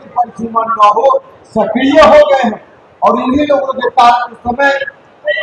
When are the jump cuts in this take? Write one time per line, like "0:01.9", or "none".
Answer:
none

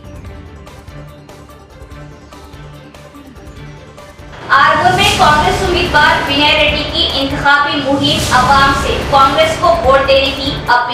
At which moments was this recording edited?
0:04.2

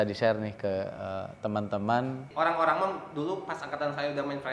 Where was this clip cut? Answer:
0:02.3

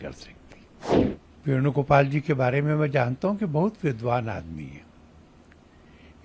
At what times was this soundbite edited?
0:00.9

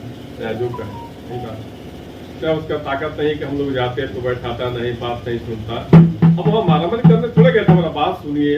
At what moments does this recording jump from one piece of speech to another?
0:02.4

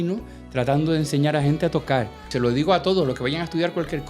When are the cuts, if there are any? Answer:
0:02.3

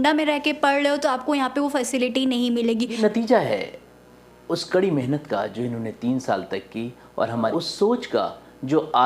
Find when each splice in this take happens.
0:02.9
0:07.5

